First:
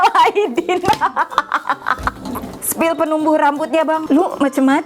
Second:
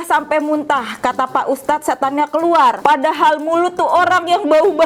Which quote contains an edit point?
first; 1 cut; at 2.7 s

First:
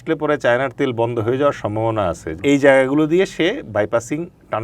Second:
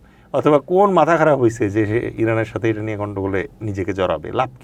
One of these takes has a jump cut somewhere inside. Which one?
first; 1 cut; at 2.3 s

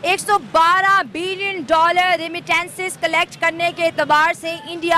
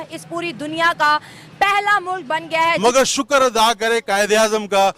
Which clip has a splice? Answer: second; 1 cut; at 2.8 s

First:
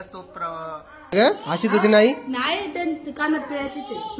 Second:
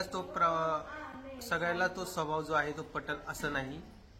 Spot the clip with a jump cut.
first; 1 cut; at 1.1 s

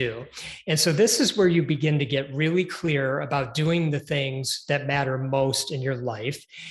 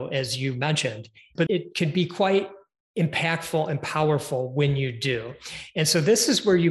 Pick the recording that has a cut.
second; 1 cut; at 1.4 s

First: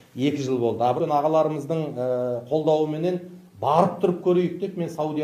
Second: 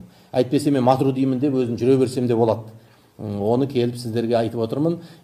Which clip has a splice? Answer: first; 1 cut; at 1.0 s

